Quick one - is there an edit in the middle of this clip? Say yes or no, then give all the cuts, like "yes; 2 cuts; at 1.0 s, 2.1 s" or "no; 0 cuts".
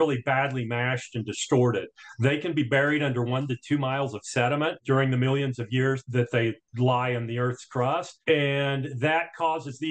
no; 0 cuts